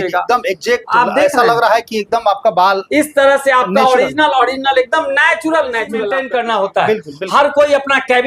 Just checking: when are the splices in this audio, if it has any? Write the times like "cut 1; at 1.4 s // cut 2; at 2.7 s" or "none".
cut 1; at 6.2 s